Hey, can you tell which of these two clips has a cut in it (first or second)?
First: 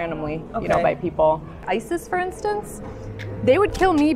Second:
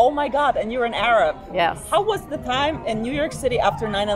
first